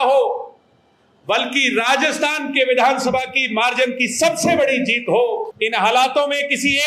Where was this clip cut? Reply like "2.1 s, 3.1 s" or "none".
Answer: 5.5 s